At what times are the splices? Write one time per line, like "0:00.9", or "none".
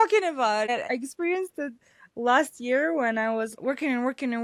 none